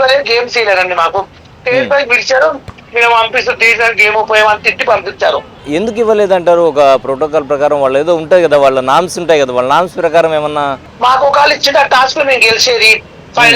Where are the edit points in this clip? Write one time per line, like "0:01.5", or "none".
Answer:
0:05.6
0:10.8